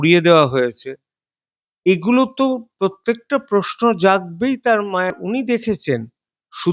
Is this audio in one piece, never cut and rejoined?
no; 1 cut; at 5.1 s

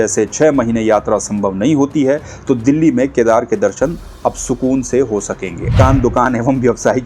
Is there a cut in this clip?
yes; 1 cut; at 5.8 s

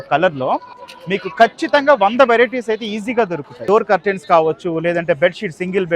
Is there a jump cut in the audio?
yes; 1 cut; at 3.6 s

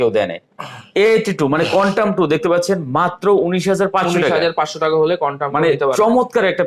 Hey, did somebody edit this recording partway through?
no; 0 cuts

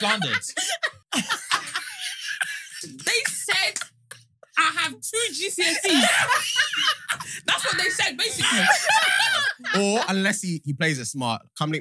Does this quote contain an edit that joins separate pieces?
yes; 2 cuts; at 1.0 s, 9.5 s

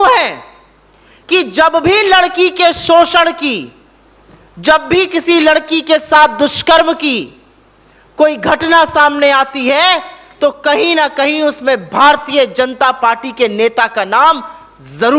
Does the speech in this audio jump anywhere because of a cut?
no; 0 cuts

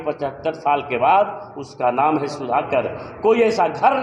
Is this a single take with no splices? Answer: yes; 0 cuts

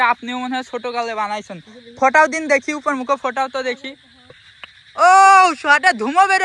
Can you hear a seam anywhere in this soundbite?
yes; 1 cut; at 4.4 s

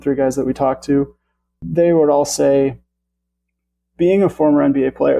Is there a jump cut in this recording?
yes; 1 cut; at 1.6 s

